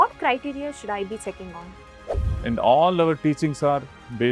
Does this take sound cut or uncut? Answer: cut